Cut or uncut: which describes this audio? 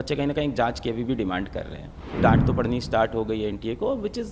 cut